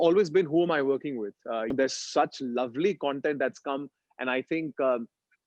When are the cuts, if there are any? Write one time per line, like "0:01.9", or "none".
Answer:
0:01.7